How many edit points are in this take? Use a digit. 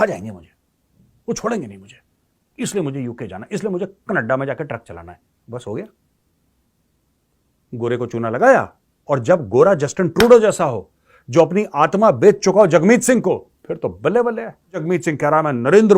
1